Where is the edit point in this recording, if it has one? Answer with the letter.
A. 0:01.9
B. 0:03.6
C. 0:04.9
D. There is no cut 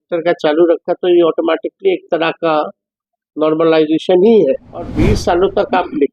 C